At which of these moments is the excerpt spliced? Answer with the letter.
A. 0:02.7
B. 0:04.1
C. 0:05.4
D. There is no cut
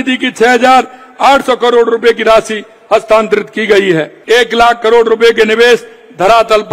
B